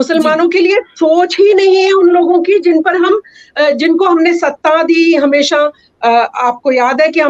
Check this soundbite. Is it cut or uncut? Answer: uncut